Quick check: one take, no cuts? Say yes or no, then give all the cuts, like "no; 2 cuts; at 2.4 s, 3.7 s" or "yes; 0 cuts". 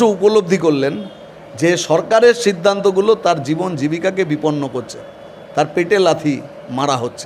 yes; 0 cuts